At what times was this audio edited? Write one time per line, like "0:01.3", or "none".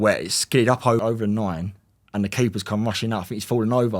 0:01.0

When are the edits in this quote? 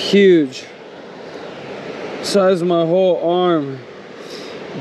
none

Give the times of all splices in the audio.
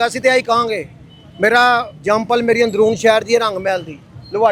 none

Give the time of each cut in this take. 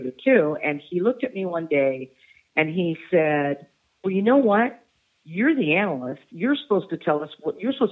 none

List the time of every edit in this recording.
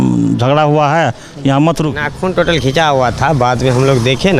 0:01.9

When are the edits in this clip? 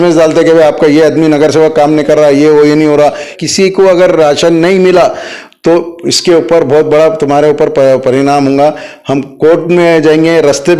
0:03.3

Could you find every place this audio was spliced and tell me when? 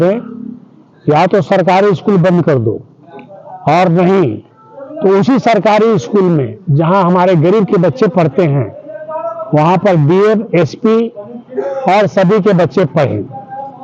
none

